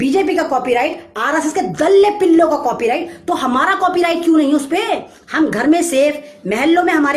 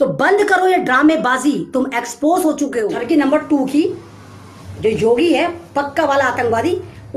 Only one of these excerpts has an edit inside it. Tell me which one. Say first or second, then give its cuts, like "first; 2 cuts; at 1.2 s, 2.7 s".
second; 1 cut; at 3.0 s